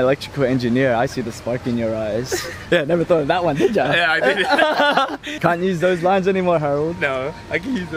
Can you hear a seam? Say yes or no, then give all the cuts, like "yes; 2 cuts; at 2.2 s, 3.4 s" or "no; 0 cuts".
yes; 2 cuts; at 2.5 s, 5.3 s